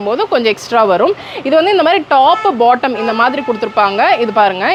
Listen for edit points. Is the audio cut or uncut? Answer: uncut